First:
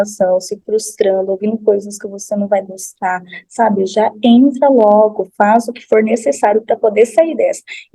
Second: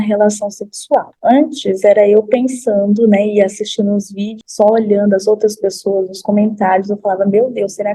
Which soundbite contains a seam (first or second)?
second